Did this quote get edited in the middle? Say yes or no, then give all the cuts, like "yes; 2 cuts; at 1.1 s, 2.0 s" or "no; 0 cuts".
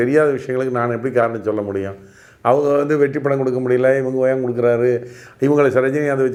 no; 0 cuts